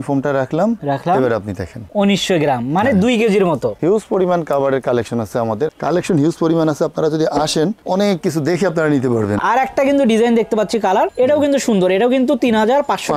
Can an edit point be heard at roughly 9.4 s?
yes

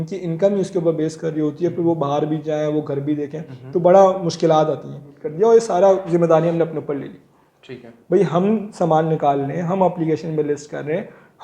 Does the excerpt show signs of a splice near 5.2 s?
yes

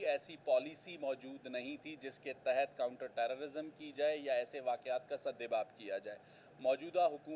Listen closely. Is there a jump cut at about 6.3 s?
no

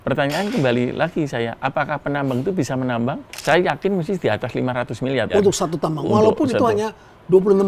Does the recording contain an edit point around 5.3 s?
yes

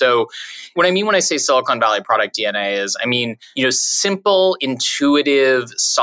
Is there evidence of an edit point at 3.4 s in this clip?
yes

